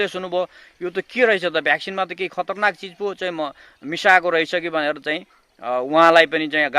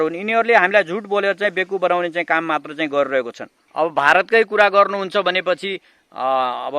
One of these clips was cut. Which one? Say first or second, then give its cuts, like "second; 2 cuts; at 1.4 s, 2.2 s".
second; 1 cut; at 3.6 s